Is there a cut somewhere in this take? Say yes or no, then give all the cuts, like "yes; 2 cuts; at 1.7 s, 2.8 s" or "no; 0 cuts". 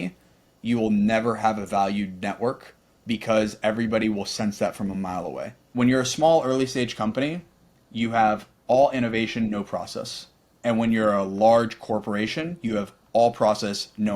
yes; 1 cut; at 5.6 s